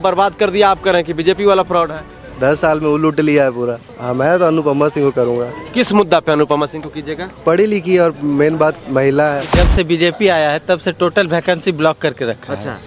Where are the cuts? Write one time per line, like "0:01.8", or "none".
0:03.9
0:09.5

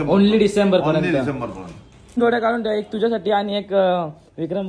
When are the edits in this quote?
0:02.2

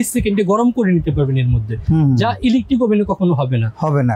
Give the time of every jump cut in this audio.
none

